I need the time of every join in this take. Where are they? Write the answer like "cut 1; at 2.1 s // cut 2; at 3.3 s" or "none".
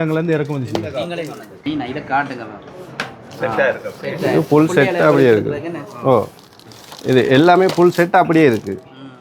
cut 1; at 1.5 s